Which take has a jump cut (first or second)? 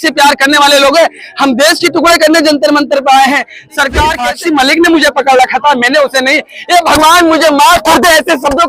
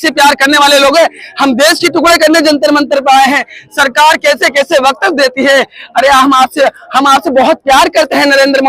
first